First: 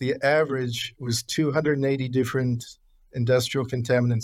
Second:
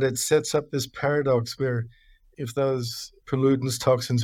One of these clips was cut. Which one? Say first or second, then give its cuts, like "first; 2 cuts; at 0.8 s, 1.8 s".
second; 2 cuts; at 2.3 s, 3.1 s